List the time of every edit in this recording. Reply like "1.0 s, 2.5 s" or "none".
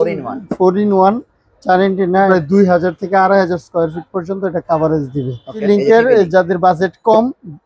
2.3 s, 5.6 s